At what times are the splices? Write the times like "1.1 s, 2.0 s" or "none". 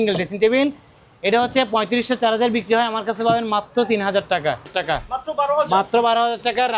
4.7 s